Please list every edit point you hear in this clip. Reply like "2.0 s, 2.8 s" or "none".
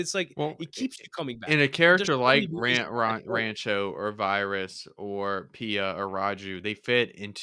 none